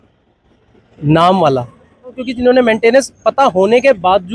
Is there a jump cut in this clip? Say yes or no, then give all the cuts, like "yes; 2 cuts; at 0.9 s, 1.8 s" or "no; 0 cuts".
yes; 1 cut; at 2.3 s